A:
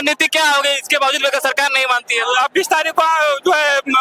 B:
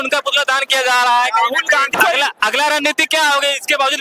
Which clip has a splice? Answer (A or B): B